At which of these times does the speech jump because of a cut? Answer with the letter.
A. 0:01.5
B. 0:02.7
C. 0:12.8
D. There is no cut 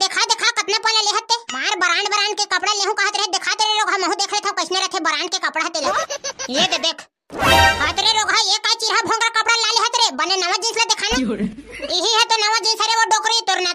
A